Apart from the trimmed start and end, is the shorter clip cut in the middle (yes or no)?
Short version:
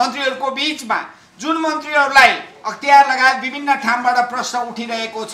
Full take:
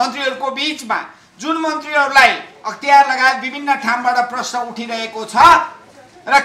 no